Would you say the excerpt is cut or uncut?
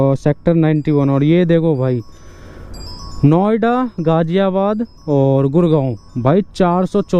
uncut